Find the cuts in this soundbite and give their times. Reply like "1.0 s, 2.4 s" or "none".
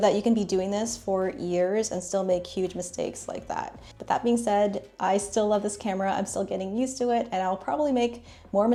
none

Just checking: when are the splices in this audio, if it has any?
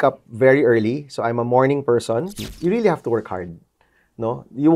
2.4 s

